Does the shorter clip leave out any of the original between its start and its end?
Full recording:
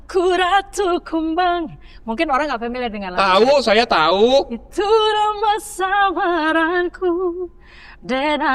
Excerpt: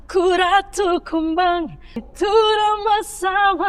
yes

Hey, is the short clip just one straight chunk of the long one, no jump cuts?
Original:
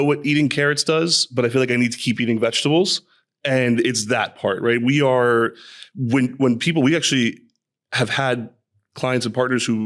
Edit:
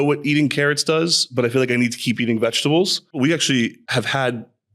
no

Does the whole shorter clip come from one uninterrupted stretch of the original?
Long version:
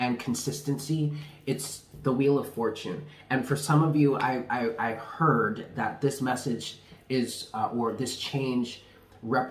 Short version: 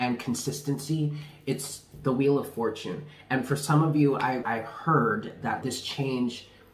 no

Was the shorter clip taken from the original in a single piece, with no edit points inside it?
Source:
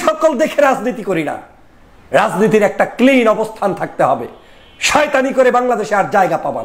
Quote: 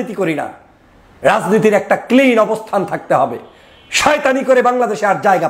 yes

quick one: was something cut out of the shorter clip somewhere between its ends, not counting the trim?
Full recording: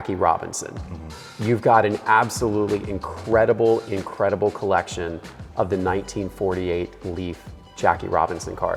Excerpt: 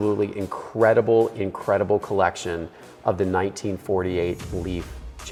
no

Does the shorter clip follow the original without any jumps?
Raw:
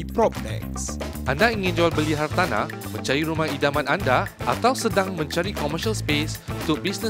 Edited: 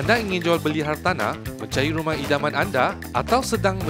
yes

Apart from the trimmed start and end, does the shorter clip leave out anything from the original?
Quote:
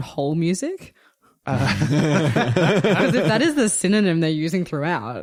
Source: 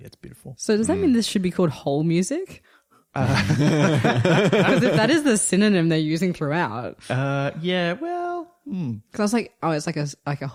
no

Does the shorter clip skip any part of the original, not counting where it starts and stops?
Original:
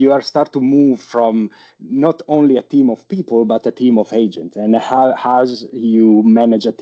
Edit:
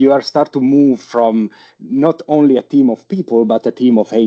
no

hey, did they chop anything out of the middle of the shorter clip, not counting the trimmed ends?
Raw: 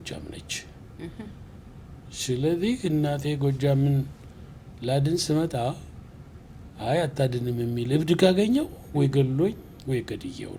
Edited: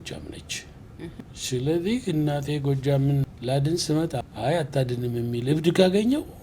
yes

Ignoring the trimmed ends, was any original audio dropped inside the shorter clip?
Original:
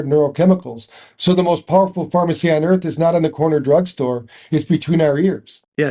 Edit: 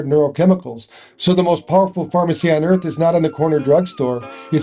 no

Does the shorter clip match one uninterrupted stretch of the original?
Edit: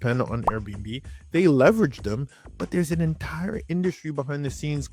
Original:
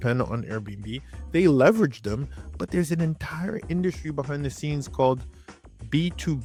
yes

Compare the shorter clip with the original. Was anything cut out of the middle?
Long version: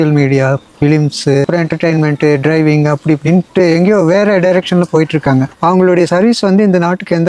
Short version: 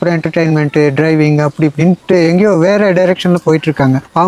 no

